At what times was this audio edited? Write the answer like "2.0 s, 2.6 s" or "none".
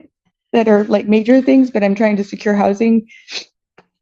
none